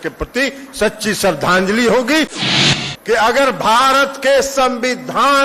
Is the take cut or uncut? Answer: cut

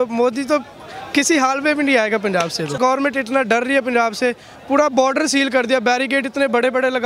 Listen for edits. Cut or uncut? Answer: cut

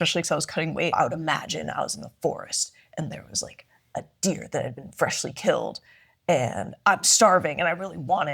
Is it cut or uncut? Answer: cut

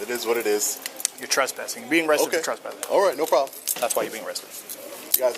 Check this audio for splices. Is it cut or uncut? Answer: uncut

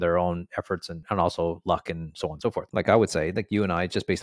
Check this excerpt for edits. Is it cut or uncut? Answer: cut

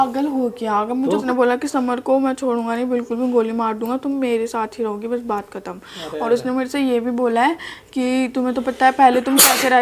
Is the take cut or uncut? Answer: cut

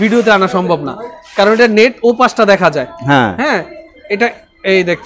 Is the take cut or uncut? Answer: uncut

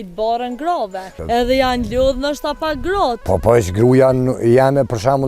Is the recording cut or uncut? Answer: cut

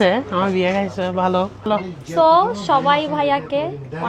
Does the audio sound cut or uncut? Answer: cut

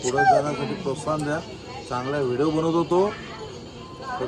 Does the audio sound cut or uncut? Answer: uncut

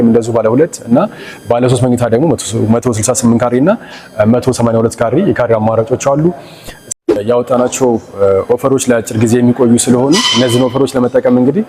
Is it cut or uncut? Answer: cut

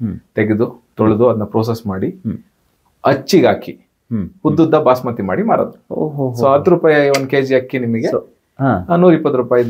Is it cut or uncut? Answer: uncut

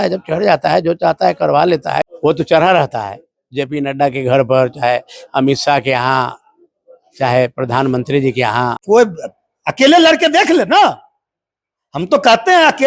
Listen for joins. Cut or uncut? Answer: cut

